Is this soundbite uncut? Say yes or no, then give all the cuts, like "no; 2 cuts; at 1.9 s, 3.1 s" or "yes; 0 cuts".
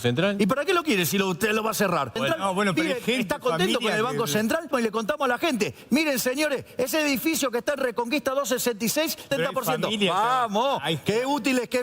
no; 3 cuts; at 2.2 s, 4.7 s, 9.3 s